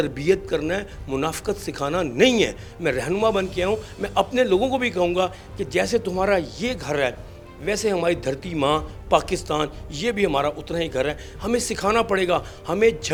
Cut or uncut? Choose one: uncut